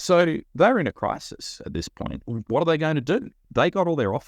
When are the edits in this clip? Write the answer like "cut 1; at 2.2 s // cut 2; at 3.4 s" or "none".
cut 1; at 2.2 s // cut 2; at 3.4 s